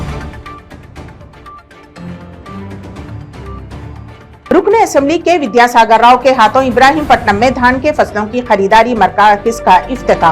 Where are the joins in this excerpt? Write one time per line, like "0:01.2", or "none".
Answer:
0:04.4